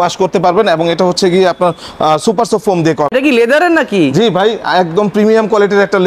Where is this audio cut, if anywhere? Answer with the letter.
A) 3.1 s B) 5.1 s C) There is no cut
A